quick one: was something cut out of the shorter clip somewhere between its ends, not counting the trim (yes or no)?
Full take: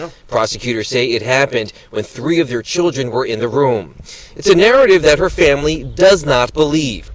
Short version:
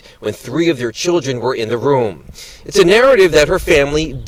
no